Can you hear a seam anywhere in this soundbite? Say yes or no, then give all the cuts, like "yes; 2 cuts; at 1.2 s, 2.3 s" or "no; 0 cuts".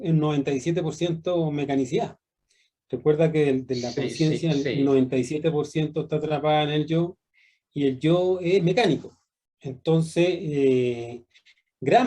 no; 0 cuts